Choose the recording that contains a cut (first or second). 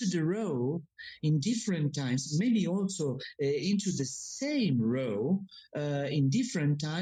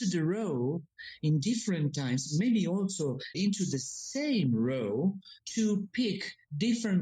second